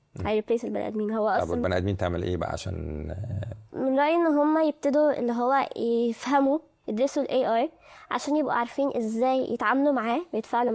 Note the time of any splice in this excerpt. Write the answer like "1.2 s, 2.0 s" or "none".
6.8 s